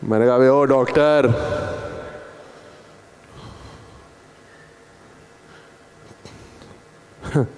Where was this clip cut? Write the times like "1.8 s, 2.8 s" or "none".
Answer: none